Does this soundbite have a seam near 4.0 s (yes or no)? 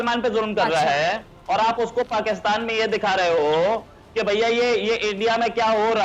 no